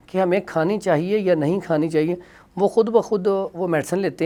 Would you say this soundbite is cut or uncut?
uncut